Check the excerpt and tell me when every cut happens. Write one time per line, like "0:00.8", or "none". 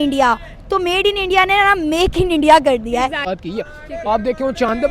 0:03.3